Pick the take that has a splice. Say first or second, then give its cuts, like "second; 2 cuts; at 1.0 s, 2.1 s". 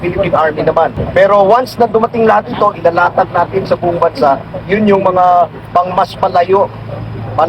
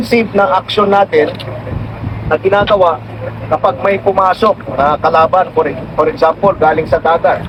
first; 1 cut; at 1.0 s